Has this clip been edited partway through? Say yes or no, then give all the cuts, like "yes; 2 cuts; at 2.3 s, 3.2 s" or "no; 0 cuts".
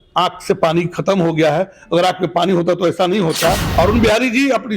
yes; 1 cut; at 3.6 s